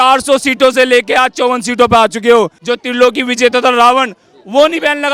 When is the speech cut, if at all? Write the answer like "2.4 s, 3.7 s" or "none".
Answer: 2.6 s